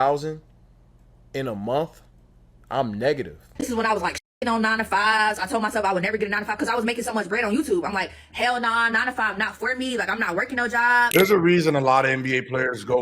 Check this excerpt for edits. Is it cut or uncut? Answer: cut